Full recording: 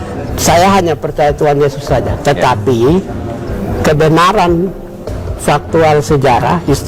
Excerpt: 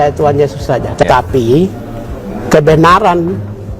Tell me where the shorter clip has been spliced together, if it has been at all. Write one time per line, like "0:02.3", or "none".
0:01.0